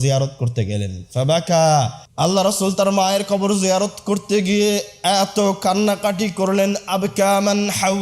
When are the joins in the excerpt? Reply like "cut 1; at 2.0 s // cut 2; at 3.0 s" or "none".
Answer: cut 1; at 2.0 s

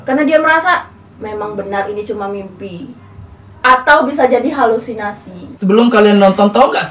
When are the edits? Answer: cut 1; at 5.5 s

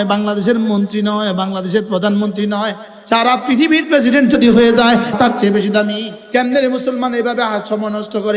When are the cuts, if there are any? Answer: cut 1; at 5.1 s // cut 2; at 6.1 s

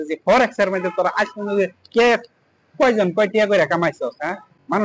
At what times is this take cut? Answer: none

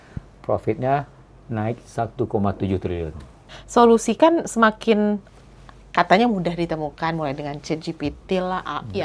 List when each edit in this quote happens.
cut 1; at 3.5 s

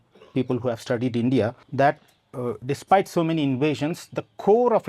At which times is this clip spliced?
cut 1; at 1.6 s

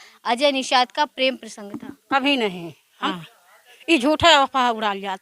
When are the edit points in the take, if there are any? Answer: cut 1; at 3.1 s

